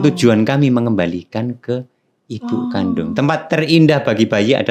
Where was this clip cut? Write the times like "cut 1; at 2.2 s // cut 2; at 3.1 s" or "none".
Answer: none